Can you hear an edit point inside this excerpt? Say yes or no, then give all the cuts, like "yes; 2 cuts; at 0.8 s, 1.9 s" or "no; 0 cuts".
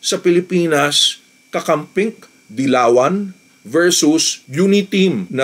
no; 0 cuts